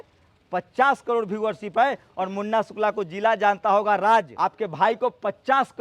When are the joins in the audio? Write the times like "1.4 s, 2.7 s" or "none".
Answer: 4.3 s

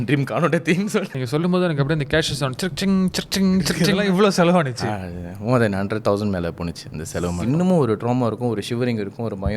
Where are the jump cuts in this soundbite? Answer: 1.2 s, 3.8 s, 4.8 s, 7.4 s

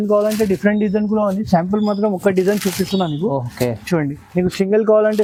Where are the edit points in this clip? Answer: none

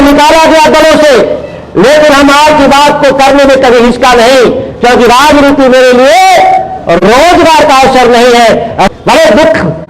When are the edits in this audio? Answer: 8.9 s

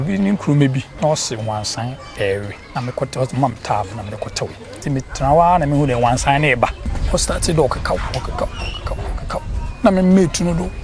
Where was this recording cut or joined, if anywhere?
0.9 s, 2.6 s, 4.8 s, 6.9 s

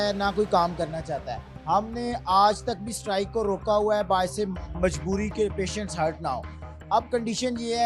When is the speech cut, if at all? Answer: none

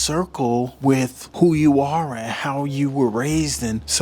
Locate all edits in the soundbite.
none

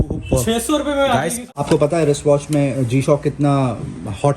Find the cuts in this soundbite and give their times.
1.5 s

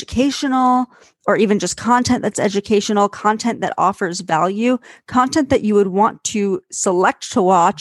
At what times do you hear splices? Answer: none

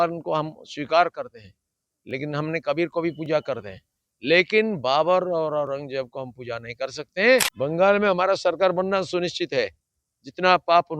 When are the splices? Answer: 7.5 s

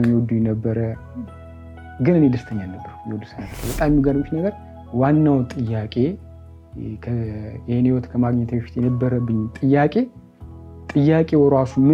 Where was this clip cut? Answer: 3.6 s

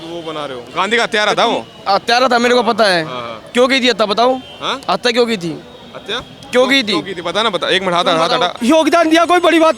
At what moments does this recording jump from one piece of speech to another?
8.5 s

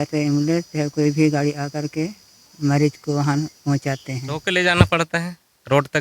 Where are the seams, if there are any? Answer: 4.4 s

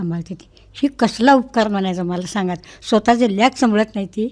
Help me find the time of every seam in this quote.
none

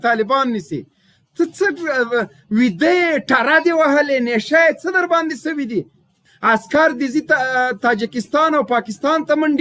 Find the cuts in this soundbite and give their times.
6.3 s

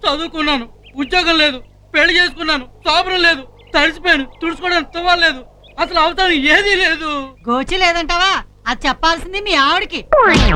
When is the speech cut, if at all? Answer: none

